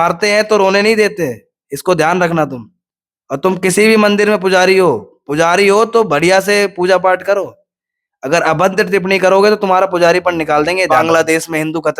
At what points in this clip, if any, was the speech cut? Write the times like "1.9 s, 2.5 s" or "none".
10.9 s